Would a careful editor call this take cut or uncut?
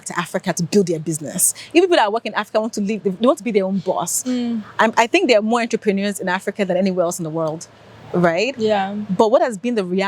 uncut